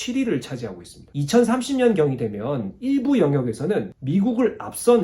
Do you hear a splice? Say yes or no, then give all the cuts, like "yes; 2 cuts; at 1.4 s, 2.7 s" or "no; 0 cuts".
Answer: yes; 1 cut; at 1.1 s